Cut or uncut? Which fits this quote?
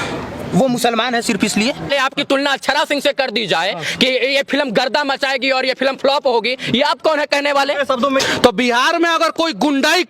cut